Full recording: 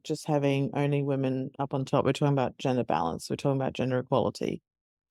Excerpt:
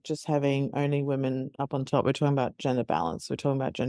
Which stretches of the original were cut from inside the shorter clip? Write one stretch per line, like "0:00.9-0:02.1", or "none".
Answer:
none